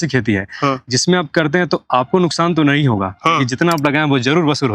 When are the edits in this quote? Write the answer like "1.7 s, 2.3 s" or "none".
none

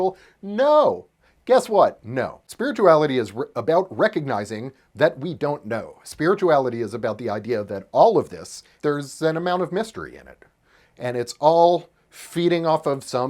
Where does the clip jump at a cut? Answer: 2.4 s, 8.7 s

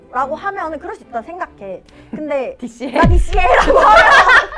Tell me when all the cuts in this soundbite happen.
none

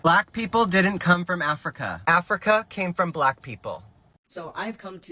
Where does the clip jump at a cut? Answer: 4.1 s

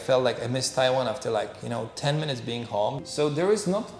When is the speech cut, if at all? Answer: 3.0 s

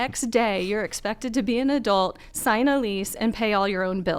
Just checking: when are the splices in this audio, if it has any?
none

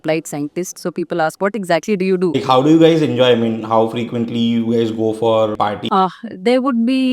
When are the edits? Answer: 2.3 s, 5.7 s

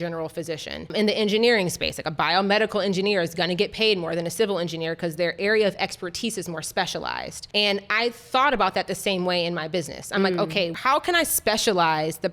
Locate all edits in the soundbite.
0.9 s, 10.7 s

